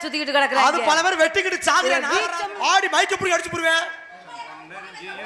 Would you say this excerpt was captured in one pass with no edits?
no; 1 cut; at 2.3 s

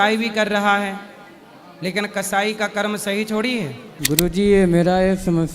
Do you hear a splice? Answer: yes; 1 cut; at 3.9 s

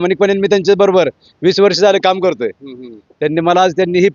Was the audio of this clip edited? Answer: no; 0 cuts

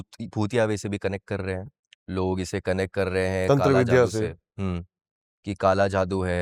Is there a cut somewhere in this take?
no; 0 cuts

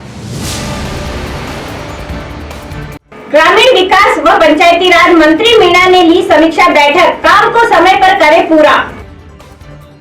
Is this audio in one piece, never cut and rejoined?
no; 1 cut; at 3.0 s

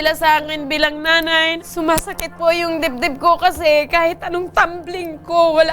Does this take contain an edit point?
yes; 1 cut; at 1.6 s

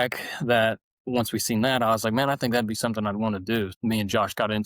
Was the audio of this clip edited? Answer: yes; 1 cut; at 3.7 s

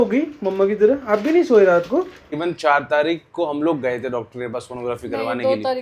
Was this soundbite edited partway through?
yes; 1 cut; at 2.4 s

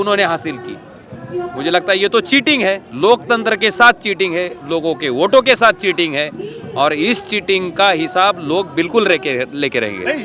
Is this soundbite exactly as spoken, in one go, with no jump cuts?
yes; 0 cuts

